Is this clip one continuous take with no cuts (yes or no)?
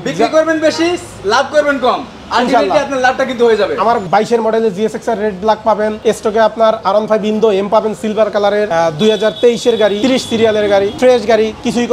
no